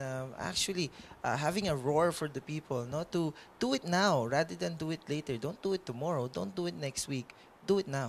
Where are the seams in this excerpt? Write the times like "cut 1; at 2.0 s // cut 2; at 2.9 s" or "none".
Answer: cut 1; at 5.4 s